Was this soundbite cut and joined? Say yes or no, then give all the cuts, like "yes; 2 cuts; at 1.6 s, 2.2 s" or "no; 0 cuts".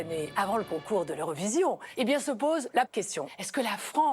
yes; 2 cuts; at 1.9 s, 3.0 s